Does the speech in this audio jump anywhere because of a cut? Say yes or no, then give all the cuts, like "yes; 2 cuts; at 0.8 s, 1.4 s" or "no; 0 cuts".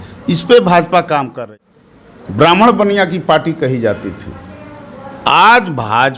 yes; 1 cut; at 1.5 s